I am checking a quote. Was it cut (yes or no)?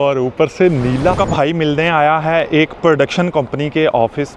yes